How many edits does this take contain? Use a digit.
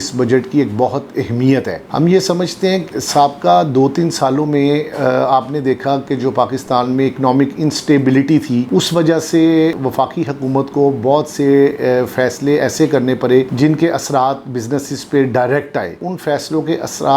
0